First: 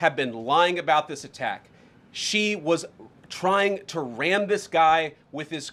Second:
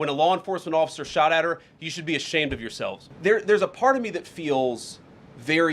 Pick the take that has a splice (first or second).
second